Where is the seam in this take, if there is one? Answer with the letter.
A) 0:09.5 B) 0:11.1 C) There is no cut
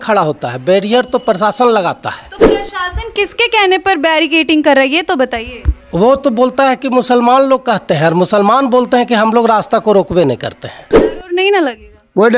B